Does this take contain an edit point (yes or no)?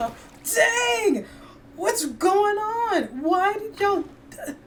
no